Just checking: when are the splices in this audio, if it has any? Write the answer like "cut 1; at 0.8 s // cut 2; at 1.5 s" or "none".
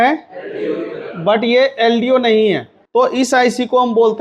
cut 1; at 2.7 s